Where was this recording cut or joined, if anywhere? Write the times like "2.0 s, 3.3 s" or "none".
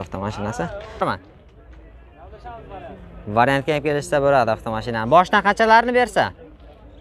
1.0 s